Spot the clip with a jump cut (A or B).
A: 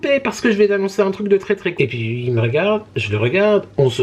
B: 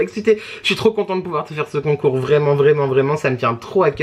A